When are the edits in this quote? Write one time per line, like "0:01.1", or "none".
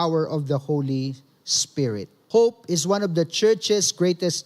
0:02.1